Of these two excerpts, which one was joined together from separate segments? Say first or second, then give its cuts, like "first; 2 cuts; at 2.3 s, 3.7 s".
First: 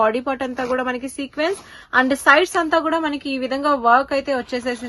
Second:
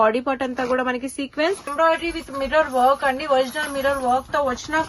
second; 1 cut; at 1.7 s